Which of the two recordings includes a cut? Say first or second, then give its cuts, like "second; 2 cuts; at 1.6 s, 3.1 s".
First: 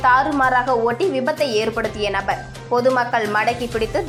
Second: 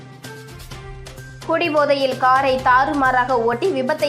second; 1 cut; at 1.3 s